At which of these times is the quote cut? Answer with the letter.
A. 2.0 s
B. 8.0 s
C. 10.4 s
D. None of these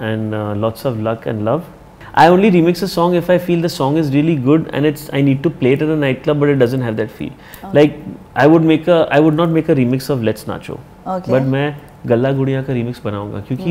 A